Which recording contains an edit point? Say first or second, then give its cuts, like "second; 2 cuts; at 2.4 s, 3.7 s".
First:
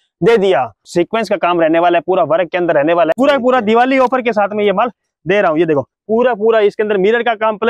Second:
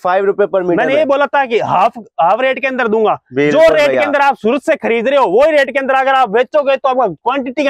first; 3 cuts; at 0.8 s, 3.1 s, 5.9 s